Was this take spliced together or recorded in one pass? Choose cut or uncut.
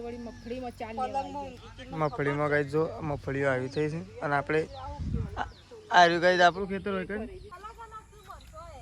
cut